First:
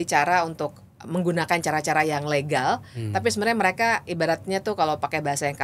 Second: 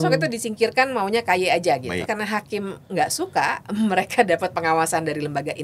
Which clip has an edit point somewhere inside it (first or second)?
second